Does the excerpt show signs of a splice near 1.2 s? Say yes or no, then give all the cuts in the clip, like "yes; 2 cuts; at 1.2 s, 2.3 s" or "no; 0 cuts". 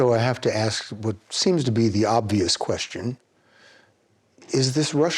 no; 0 cuts